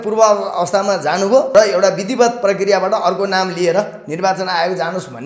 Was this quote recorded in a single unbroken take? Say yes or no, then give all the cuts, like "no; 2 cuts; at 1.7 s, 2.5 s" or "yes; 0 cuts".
no; 1 cut; at 1.5 s